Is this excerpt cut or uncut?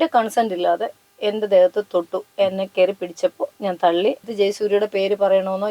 cut